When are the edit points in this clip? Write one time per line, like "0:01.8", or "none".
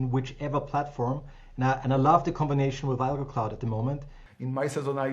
0:04.2